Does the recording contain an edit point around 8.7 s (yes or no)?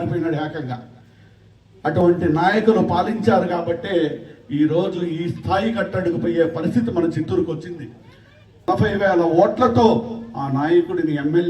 yes